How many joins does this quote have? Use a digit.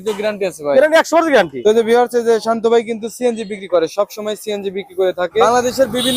2